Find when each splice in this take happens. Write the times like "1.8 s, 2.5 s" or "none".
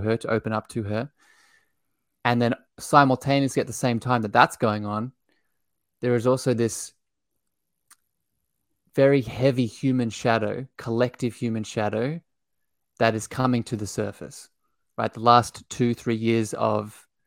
none